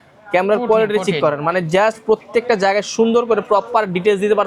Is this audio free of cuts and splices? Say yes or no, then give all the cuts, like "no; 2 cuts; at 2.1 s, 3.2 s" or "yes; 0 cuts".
yes; 0 cuts